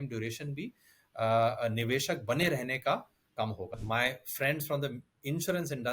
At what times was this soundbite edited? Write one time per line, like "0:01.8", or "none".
0:03.8